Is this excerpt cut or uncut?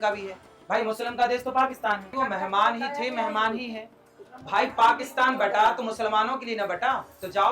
cut